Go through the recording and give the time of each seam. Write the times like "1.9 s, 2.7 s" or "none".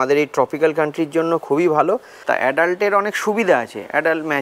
2.1 s